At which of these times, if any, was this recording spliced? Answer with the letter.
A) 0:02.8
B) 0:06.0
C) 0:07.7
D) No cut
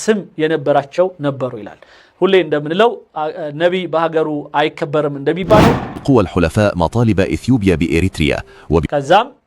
B